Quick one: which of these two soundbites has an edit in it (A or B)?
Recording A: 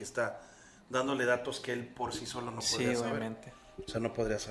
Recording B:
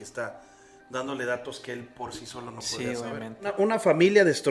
B